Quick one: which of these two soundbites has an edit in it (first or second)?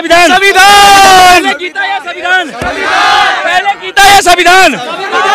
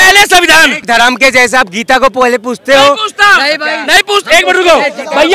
second